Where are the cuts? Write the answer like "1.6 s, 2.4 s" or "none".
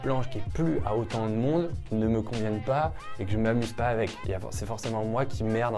none

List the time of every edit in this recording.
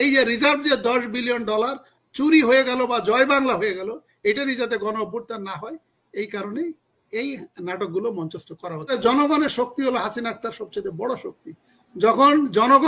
8.9 s

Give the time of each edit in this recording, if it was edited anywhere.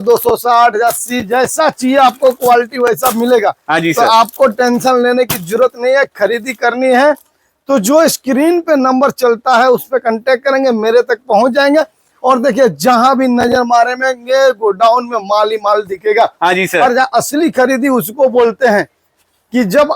none

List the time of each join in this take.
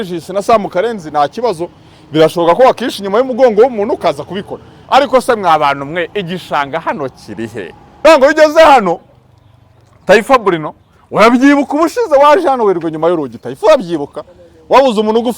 7.8 s

